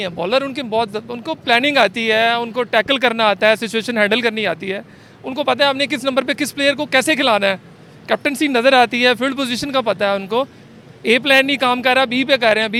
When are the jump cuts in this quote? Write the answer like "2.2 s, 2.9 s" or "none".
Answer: none